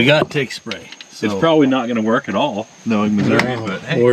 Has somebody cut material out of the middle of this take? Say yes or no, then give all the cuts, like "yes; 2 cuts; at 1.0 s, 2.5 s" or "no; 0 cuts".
no; 0 cuts